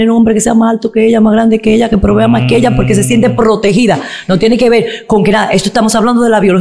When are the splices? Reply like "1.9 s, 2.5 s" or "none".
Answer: none

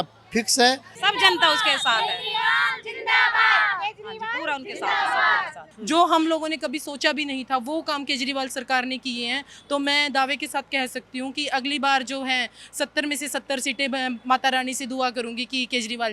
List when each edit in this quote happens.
0.9 s, 5.5 s

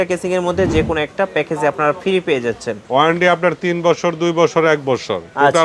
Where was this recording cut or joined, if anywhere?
2.8 s

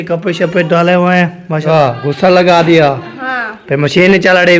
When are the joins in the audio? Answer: 1.6 s

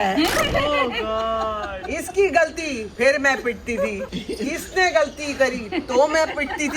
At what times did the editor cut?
4.0 s

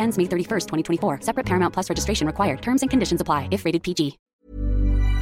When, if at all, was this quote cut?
4.3 s

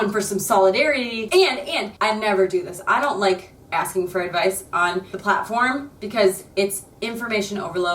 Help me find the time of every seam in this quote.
1.3 s

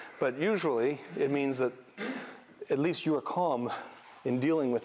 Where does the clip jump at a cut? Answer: none

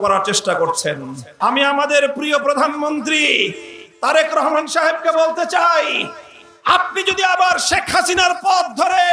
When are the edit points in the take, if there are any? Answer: 1.3 s

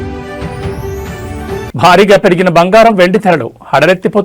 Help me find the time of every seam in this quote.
none

